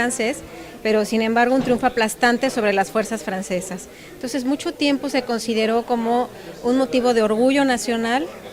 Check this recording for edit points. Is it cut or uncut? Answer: uncut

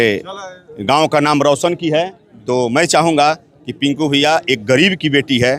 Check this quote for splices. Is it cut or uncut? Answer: uncut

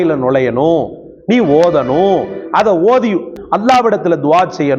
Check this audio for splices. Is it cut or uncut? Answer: cut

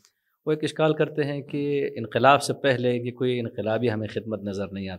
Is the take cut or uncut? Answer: uncut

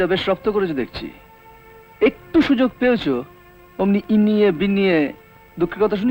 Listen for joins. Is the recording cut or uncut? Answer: uncut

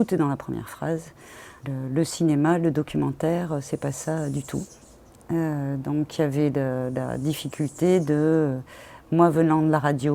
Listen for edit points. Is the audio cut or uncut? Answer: uncut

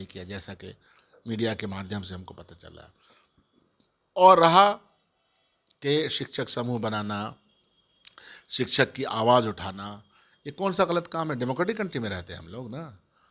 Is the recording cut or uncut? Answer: uncut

